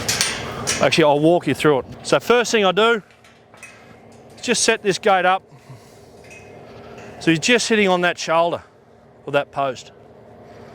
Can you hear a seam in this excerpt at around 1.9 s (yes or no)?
yes